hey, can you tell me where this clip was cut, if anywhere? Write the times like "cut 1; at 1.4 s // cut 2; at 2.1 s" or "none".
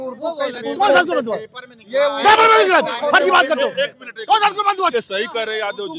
none